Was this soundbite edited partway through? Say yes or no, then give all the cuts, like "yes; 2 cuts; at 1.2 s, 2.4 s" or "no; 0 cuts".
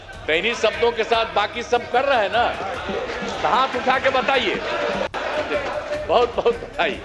no; 0 cuts